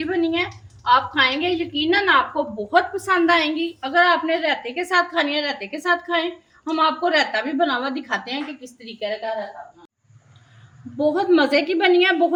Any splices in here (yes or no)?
no